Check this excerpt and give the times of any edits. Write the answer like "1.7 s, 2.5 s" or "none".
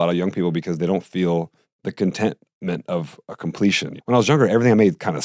1.6 s, 3.9 s